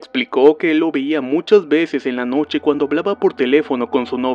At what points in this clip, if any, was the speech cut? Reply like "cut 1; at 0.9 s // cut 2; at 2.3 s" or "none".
none